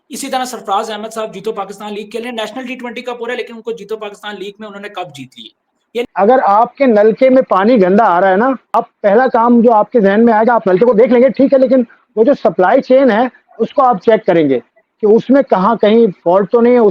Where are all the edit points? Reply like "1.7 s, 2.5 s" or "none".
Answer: 6.0 s, 8.7 s